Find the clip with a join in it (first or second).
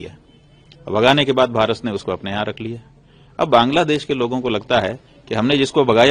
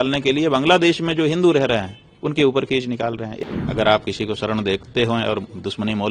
second